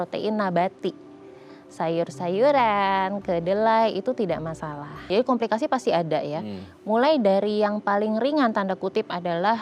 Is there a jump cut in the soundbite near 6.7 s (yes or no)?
no